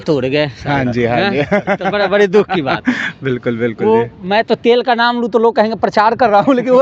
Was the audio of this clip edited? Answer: no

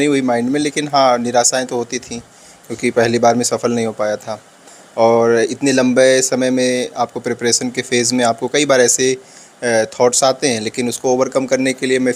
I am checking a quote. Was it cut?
no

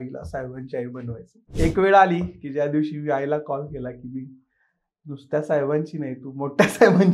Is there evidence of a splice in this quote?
yes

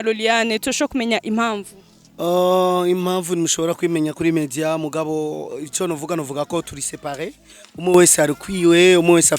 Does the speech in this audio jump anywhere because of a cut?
no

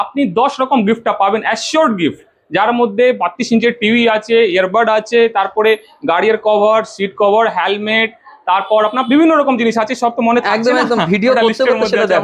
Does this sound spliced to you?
no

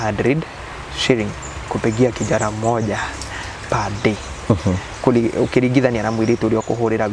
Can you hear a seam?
no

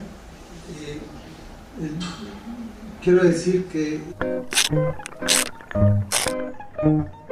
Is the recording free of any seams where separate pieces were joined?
yes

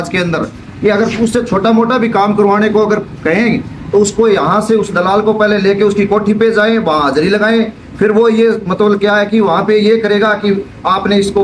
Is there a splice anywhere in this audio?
no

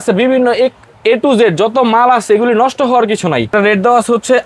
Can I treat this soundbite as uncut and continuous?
no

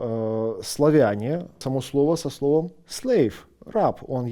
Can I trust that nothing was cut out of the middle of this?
no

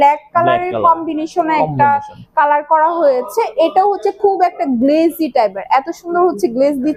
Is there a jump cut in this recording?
no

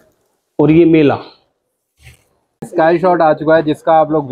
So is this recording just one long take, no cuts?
no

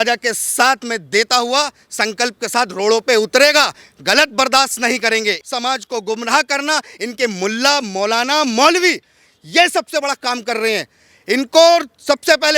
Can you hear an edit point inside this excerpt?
yes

